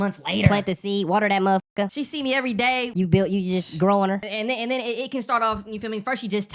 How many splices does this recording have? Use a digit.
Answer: 3